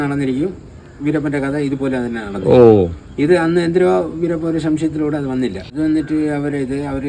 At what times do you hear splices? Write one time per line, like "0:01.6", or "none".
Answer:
0:05.7